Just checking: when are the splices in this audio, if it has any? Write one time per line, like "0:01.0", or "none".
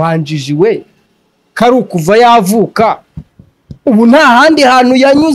none